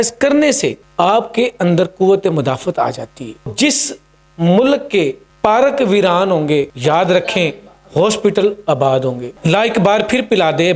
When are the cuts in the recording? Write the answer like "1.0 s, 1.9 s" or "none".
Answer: 0.8 s, 3.5 s, 5.2 s, 6.7 s, 9.3 s

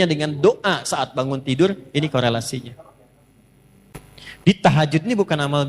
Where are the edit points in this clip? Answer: 3.9 s

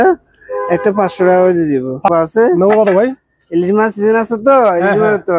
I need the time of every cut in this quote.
2.1 s

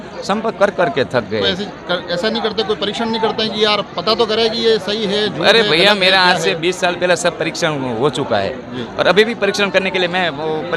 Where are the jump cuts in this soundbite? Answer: none

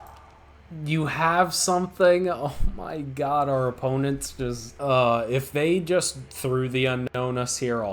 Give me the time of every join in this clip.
4.7 s

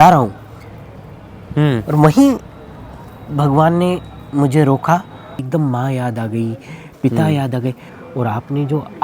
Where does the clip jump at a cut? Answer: 5.4 s, 7.9 s

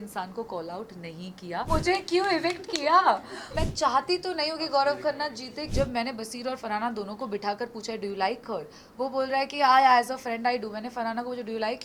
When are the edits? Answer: 1.7 s, 3.5 s, 5.6 s

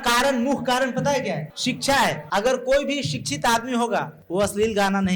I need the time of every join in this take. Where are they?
1.5 s, 2.2 s, 4.2 s

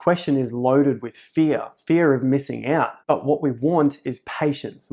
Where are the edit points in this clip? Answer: none

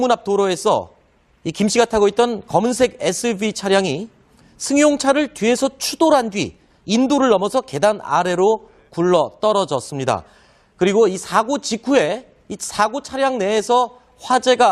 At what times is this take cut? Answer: none

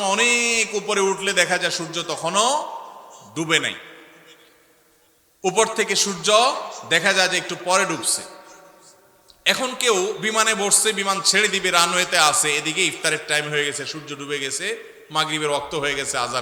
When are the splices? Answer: none

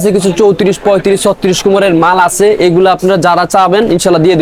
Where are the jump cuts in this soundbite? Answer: none

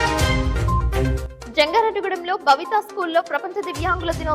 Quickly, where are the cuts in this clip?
1.1 s

